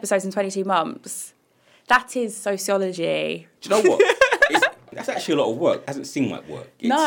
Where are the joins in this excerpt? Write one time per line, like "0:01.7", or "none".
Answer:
0:03.5
0:04.9
0:05.9

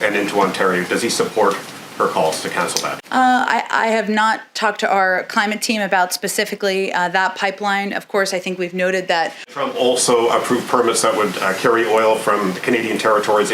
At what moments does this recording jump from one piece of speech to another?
0:09.5

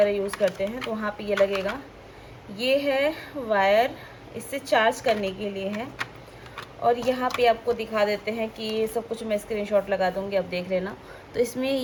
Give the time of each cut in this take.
none

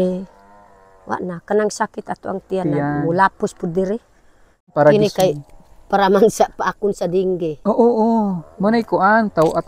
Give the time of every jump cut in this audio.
0:04.7

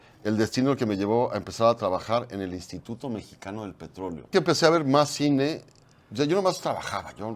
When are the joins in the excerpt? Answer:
0:04.3

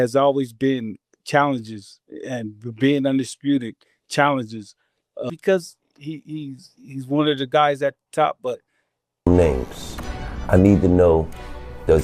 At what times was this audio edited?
0:05.3
0:09.3

